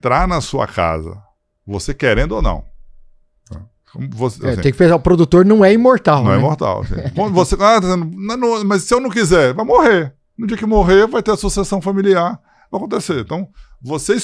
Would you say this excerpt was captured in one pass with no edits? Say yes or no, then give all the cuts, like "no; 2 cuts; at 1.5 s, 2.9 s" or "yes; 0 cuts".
yes; 0 cuts